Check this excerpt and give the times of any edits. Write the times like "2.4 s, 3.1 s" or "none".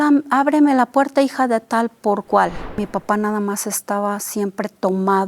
2.8 s